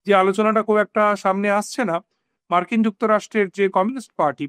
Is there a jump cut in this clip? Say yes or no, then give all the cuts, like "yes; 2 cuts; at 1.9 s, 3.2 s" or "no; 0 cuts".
no; 0 cuts